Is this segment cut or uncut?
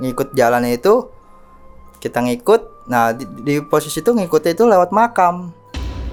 uncut